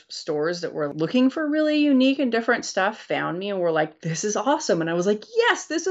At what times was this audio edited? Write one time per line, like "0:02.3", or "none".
0:00.9